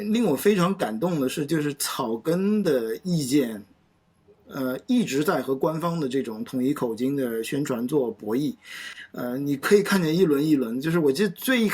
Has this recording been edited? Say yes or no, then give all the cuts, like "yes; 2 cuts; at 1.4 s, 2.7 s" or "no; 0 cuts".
no; 0 cuts